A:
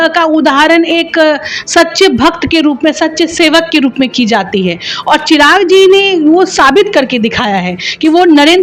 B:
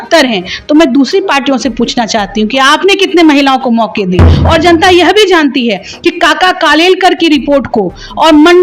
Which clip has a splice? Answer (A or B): B